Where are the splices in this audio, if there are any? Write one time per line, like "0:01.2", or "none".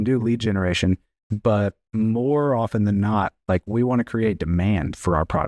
0:01.8